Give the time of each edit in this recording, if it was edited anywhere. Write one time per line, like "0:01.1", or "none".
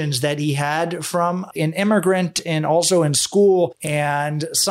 0:01.6